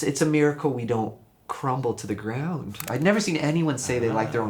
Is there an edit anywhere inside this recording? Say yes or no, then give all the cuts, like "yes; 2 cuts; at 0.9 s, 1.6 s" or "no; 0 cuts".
yes; 1 cut; at 2.8 s